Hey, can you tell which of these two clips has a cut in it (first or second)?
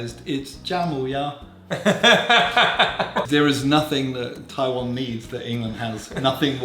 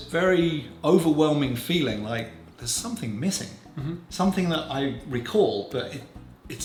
first